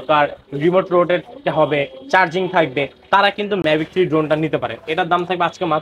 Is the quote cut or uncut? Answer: uncut